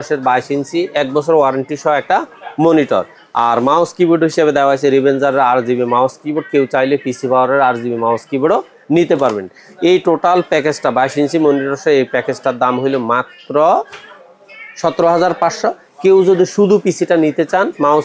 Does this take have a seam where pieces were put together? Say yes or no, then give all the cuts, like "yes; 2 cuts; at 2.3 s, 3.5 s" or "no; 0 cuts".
no; 0 cuts